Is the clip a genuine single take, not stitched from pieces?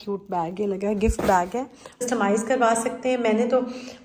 no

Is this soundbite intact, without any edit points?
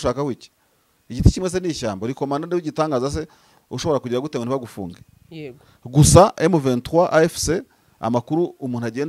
yes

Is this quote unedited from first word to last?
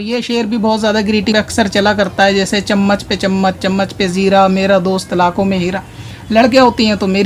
no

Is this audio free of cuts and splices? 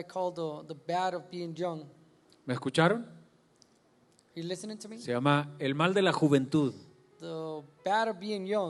yes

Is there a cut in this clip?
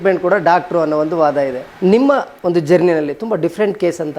yes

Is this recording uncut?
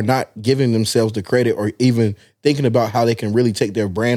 yes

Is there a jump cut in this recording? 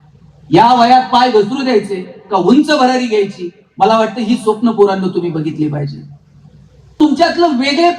yes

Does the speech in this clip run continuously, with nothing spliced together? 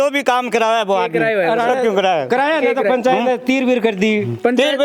yes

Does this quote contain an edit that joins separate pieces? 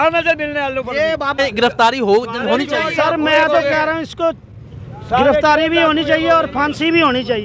yes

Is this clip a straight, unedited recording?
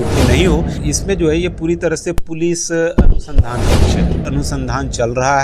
no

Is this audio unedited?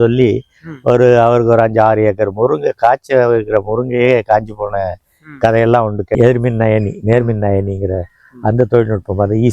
no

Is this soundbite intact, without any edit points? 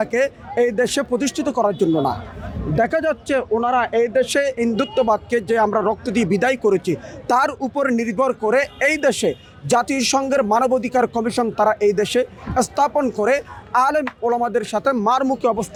yes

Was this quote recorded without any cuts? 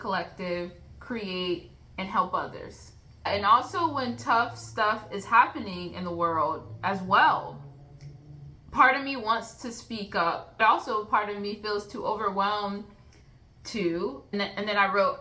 no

